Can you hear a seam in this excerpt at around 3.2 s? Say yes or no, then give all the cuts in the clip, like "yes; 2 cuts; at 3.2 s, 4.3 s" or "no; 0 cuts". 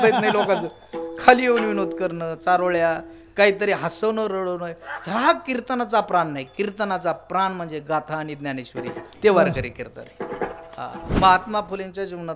no; 1 cut; at 11.1 s